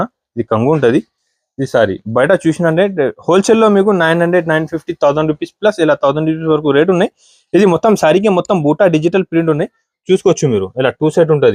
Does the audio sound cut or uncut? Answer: uncut